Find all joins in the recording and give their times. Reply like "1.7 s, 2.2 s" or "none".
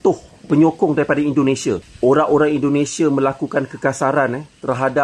1.9 s